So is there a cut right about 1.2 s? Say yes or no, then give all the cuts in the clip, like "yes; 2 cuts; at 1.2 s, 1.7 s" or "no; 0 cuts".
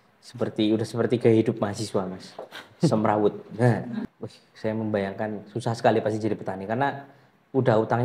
no; 1 cut; at 4.1 s